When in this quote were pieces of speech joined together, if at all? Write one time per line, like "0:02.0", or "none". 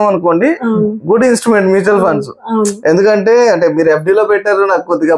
none